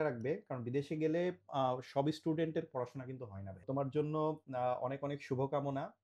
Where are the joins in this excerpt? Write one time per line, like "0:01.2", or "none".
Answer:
0:03.6